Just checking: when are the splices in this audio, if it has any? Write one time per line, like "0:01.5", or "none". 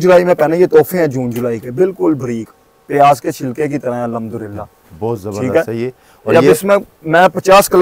none